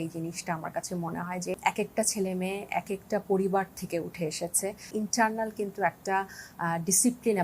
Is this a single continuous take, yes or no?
no